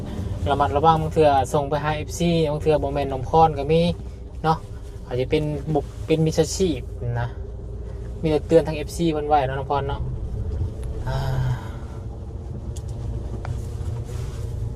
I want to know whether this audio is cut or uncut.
uncut